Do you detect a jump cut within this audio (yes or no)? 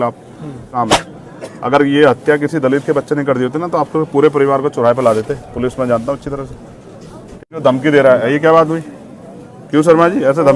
yes